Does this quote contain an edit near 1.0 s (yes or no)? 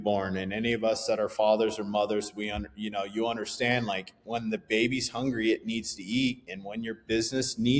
no